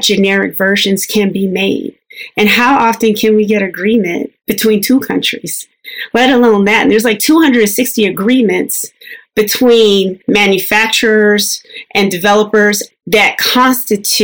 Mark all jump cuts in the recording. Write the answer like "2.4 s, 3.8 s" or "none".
10.2 s, 12.8 s